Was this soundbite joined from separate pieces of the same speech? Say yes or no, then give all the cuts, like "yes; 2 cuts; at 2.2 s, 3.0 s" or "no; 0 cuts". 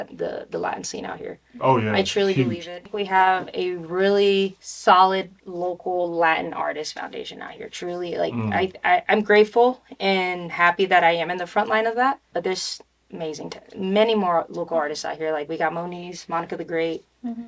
yes; 3 cuts; at 2.7 s, 4.6 s, 5.4 s